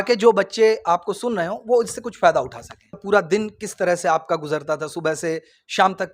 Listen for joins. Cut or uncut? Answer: cut